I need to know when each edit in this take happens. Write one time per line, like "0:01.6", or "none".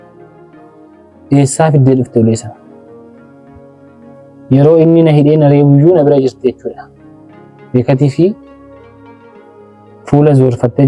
0:02.7
0:04.5
0:08.3
0:10.1